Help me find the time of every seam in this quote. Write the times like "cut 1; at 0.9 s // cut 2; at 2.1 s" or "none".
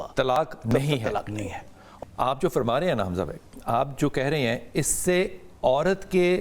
cut 1; at 1.8 s